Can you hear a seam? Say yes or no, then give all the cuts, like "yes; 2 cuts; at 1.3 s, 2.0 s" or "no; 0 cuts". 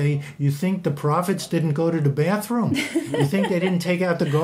no; 0 cuts